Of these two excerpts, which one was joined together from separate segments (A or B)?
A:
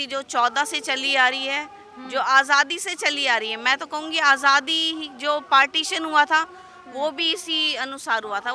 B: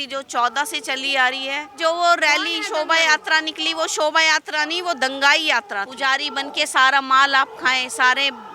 B